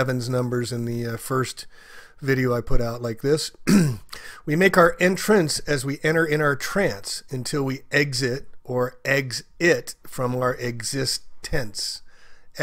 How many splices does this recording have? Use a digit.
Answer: 1